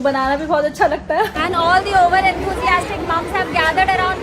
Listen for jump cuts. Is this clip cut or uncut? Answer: cut